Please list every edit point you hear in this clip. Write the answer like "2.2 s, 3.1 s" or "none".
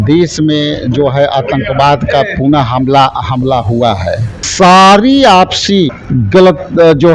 4.4 s, 6.0 s